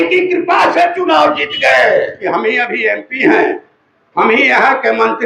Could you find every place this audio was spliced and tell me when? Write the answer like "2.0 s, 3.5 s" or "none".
2.2 s